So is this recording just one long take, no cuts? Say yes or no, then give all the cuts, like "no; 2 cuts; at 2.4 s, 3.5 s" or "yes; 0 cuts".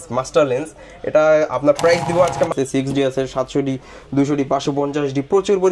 no; 1 cut; at 2.5 s